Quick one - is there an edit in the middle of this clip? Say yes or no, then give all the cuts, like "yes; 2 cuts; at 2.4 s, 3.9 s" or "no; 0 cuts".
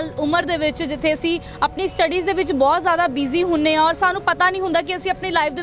no; 0 cuts